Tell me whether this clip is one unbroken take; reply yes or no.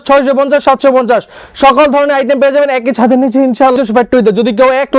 no